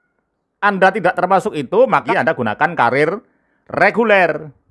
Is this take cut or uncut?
cut